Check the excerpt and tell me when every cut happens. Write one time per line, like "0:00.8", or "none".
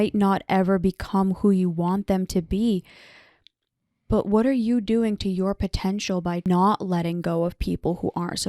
0:06.5